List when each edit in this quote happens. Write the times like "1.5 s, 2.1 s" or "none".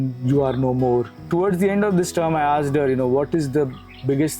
1.2 s